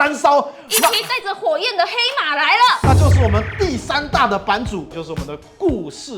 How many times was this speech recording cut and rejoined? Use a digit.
1